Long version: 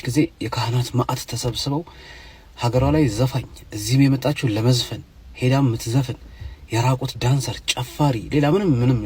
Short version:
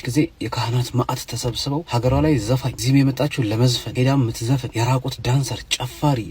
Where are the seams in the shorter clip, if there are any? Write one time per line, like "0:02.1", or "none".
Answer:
0:01.9
0:02.7
0:03.8
0:04.7